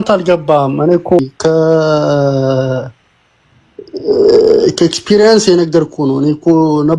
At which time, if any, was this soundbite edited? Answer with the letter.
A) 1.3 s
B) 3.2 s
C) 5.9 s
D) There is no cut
A